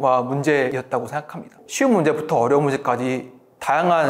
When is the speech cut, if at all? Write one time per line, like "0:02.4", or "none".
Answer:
0:01.4